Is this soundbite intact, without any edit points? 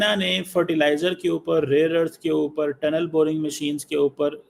yes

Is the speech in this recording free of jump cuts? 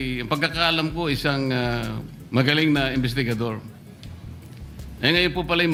yes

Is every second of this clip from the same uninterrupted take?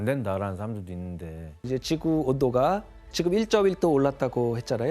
no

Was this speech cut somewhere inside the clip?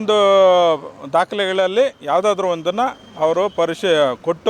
no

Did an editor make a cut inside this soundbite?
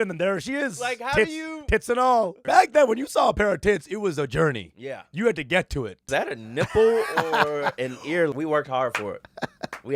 yes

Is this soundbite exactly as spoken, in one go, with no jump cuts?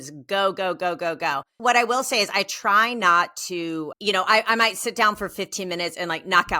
no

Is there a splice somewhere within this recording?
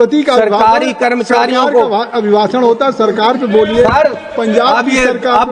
no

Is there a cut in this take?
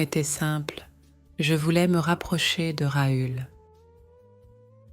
yes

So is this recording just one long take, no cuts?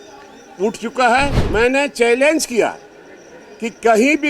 no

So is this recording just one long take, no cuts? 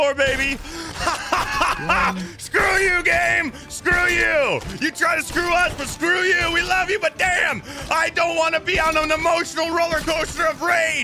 yes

